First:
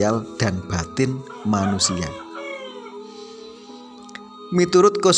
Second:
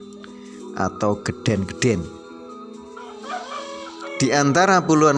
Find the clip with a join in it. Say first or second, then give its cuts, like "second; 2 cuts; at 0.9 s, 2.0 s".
second; 2 cuts; at 2.1 s, 3.5 s